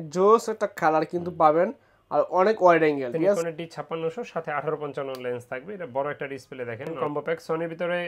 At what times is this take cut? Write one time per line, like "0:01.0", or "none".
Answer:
0:03.2
0:06.9